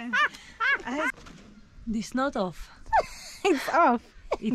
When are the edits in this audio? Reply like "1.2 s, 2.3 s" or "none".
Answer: 1.1 s